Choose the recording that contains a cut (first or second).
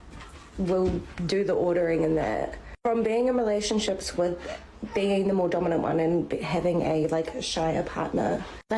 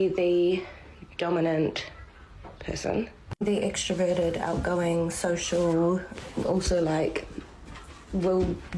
first